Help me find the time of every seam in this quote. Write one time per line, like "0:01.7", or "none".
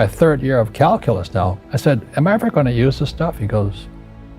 0:01.6